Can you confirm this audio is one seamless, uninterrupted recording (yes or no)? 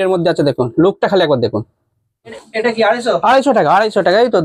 no